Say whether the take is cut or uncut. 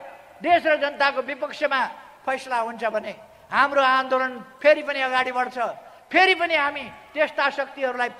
uncut